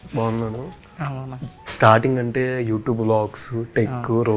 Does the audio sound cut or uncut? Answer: uncut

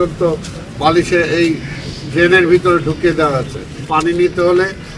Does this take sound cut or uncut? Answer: cut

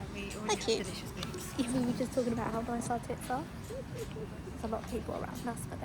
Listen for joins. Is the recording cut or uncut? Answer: uncut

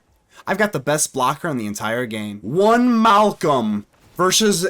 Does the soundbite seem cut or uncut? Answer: cut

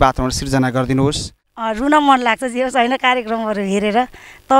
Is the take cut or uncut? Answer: cut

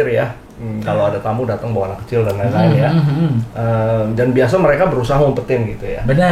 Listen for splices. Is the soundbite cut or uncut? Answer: uncut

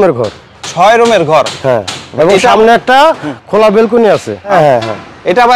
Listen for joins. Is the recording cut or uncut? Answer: uncut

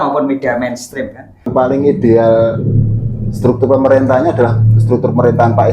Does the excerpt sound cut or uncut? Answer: cut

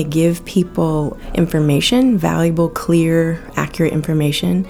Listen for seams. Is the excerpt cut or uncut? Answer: cut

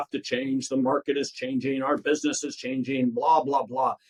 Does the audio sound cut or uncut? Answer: uncut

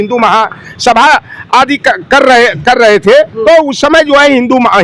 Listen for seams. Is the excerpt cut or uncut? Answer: cut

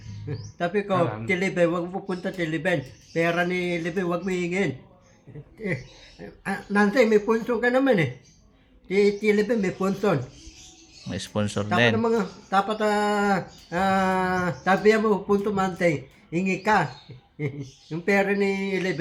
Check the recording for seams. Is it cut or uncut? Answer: uncut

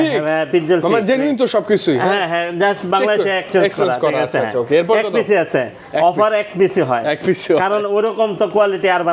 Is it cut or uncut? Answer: uncut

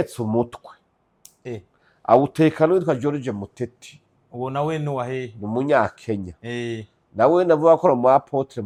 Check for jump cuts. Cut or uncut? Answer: uncut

